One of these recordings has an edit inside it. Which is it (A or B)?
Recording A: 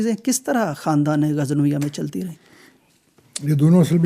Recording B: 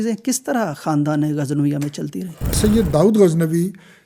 B